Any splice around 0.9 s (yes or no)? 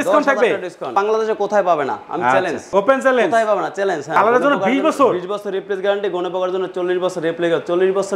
yes